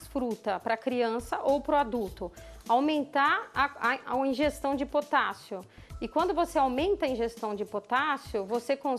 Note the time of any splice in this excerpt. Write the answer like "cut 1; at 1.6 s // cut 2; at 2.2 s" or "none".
none